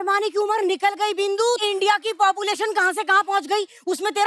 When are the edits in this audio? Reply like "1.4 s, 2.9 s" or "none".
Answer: 1.6 s